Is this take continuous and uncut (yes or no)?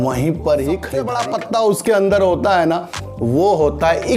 no